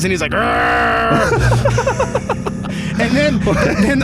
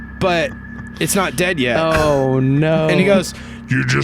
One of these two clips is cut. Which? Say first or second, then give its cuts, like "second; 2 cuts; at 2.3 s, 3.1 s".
second; 1 cut; at 2.9 s